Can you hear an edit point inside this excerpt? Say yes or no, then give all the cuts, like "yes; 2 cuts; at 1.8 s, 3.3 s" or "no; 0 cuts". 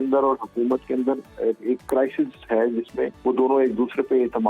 yes; 1 cut; at 3.2 s